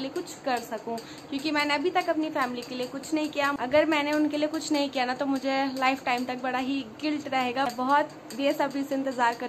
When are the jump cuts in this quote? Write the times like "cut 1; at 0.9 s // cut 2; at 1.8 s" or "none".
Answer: cut 1; at 3.6 s // cut 2; at 7.7 s